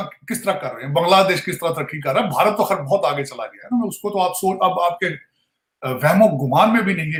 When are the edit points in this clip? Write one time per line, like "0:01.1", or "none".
none

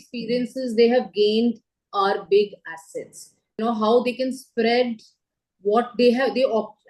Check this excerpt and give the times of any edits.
0:03.6

